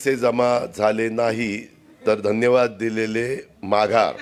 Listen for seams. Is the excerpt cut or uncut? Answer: uncut